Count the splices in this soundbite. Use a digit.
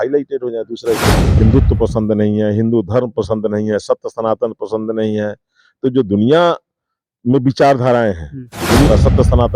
2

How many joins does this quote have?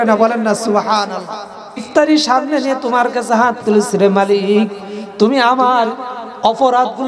1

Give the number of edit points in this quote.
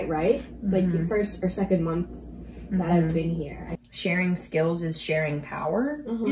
1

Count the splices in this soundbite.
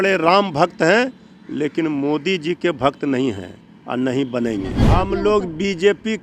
1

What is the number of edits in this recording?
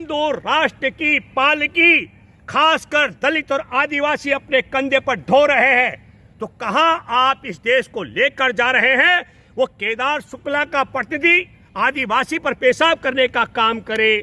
0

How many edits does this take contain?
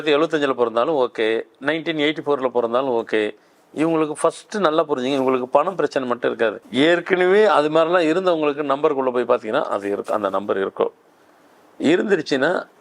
1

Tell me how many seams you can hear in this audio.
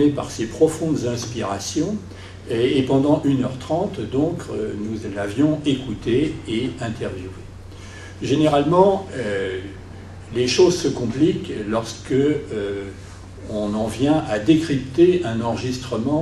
1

